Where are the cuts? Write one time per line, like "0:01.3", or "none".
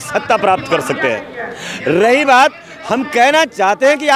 none